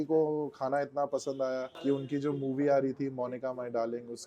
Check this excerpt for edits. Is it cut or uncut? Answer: cut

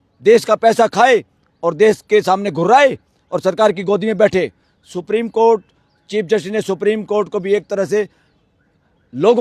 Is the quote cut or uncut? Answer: uncut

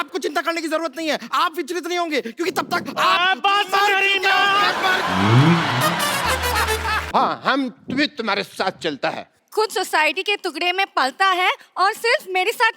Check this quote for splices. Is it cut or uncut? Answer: cut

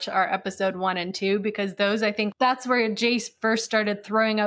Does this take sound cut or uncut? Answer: cut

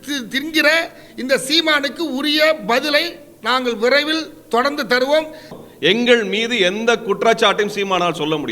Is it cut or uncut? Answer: cut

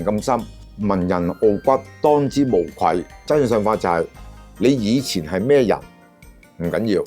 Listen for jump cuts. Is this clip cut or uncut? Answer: cut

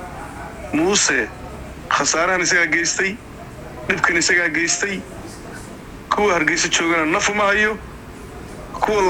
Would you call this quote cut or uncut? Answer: uncut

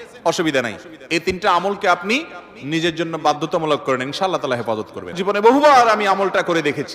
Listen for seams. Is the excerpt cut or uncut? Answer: cut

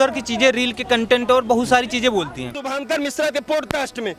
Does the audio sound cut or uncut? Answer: cut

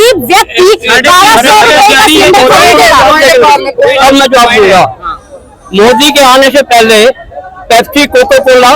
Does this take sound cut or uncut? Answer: uncut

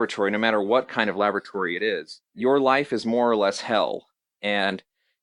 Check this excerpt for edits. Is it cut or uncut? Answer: cut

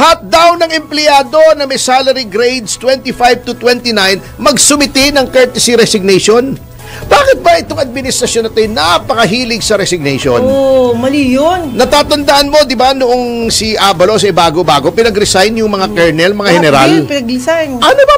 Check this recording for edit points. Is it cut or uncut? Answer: uncut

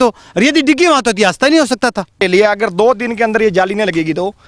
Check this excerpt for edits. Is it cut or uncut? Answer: cut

